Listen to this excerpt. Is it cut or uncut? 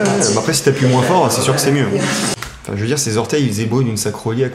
cut